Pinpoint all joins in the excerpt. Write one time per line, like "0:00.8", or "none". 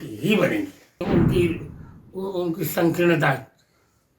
0:01.0